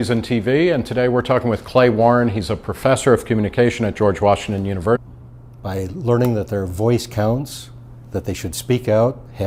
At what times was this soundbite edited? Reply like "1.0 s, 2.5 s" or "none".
none